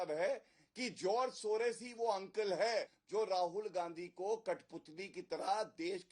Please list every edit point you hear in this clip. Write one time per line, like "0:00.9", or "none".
0:03.0